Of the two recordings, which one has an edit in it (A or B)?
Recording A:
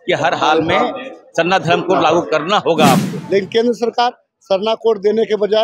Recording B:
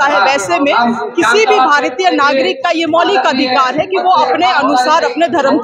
A